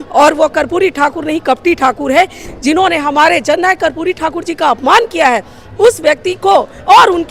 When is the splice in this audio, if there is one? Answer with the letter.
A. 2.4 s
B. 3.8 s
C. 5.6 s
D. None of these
A